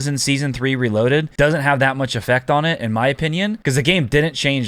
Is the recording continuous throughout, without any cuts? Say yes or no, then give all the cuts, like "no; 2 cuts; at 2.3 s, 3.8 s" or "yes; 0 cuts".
no; 2 cuts; at 1.3 s, 3.6 s